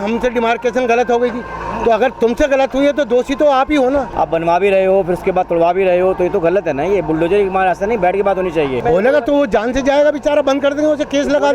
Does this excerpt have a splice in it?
yes; 2 cuts; at 4.1 s, 8.8 s

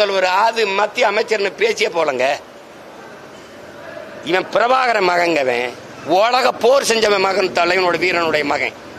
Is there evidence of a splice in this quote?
no; 0 cuts

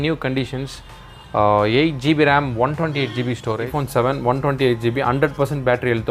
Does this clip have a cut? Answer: yes; 1 cut; at 3.7 s

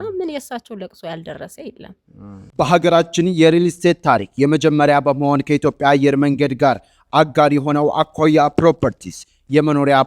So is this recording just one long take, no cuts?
no; 1 cut; at 2.4 s

